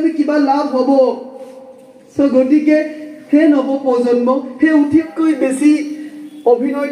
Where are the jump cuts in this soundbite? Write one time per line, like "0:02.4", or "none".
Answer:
0:05.1